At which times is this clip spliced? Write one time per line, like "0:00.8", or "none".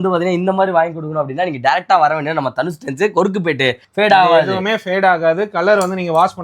0:03.8